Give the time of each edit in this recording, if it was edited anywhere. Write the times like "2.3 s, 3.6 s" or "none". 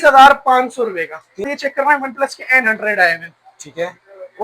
1.5 s